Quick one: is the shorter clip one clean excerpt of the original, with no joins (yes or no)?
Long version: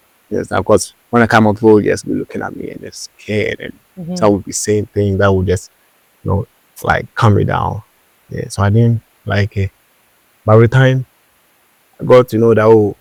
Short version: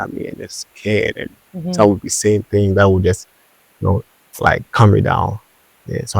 yes